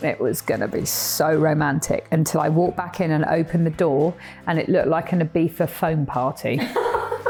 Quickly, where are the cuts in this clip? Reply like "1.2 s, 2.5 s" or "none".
none